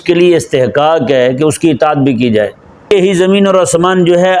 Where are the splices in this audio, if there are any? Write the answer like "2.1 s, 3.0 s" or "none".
2.9 s